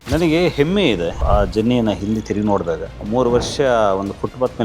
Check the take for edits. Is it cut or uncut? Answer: cut